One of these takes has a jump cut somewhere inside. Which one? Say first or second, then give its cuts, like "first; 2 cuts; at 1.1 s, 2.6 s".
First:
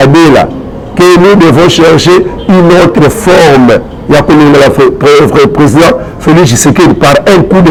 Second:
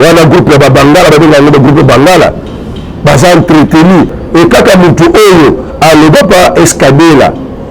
second; 1 cut; at 4.2 s